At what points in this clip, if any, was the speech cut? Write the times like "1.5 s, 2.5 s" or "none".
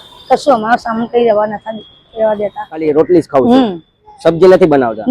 2.9 s